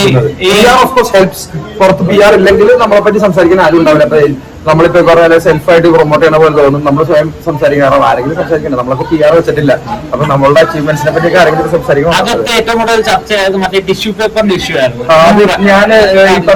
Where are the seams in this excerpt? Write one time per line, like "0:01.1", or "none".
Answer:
none